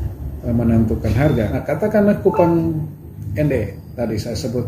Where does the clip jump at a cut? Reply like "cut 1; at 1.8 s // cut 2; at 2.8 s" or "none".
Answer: cut 1; at 1.6 s